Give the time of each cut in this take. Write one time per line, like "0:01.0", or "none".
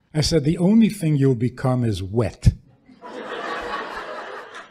none